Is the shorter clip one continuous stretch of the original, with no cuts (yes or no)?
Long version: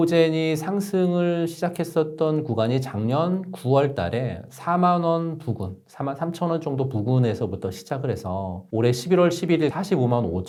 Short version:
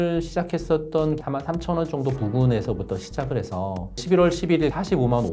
no